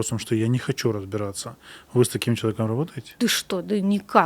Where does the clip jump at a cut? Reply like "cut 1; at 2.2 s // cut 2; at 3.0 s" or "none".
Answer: cut 1; at 3.1 s